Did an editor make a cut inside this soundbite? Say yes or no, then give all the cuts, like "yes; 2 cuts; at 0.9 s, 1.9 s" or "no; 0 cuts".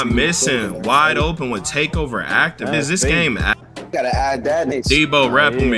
yes; 2 cuts; at 2.6 s, 3.6 s